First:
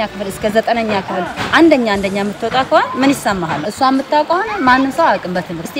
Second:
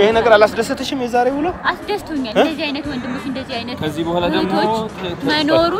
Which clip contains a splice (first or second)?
second